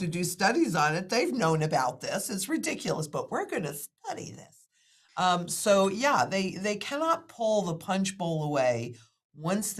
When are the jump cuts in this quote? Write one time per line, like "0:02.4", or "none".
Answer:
none